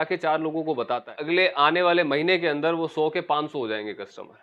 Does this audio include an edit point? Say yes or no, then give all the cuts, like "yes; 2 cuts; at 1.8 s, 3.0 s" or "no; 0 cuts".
yes; 1 cut; at 1.1 s